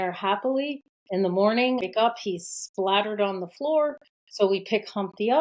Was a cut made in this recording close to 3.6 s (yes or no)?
no